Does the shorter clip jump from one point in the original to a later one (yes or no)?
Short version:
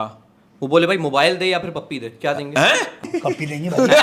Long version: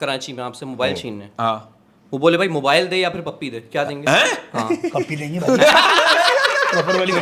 yes